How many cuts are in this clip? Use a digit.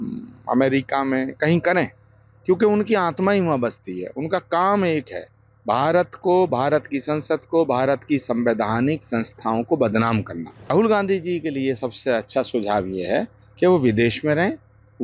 1